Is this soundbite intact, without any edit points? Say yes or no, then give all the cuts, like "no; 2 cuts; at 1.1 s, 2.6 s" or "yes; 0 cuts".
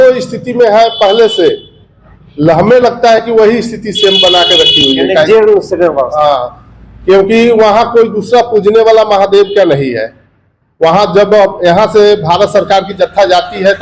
yes; 0 cuts